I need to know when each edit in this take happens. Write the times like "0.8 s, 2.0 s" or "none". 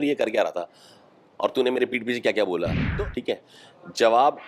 2.8 s